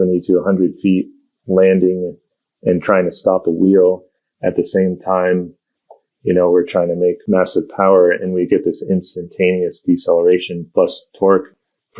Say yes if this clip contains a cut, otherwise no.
yes